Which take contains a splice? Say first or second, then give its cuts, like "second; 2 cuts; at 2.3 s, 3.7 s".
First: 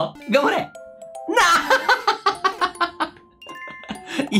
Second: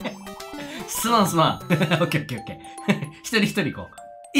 second; 1 cut; at 1.6 s